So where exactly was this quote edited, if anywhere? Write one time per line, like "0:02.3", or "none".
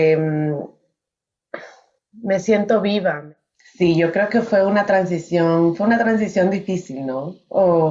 0:03.2